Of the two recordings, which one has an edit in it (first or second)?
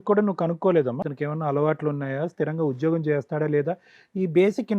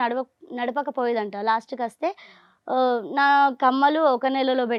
first